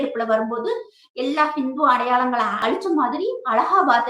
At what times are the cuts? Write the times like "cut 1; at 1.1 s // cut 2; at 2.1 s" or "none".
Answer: cut 1; at 2.6 s